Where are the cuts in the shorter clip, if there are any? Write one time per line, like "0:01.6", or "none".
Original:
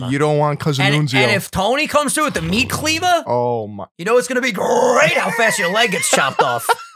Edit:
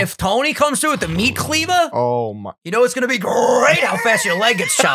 none